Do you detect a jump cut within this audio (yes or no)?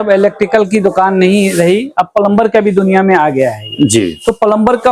no